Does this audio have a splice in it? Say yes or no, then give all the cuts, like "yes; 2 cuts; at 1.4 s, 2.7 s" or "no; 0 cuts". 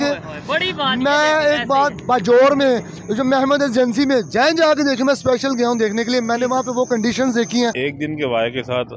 yes; 1 cut; at 7.8 s